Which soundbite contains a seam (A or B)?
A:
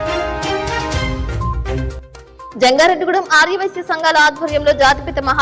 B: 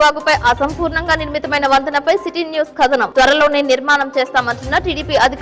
A